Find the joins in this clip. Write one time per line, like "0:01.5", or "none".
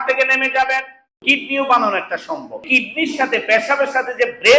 0:01.2
0:02.6